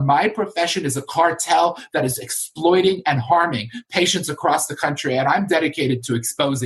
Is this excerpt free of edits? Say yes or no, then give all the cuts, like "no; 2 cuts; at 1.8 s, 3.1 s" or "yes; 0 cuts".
yes; 0 cuts